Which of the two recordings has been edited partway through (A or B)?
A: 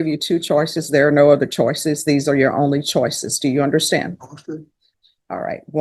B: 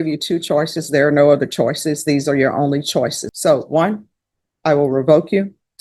B